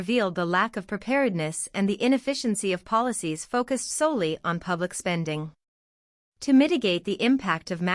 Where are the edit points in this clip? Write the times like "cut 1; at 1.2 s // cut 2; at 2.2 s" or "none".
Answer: cut 1; at 5.6 s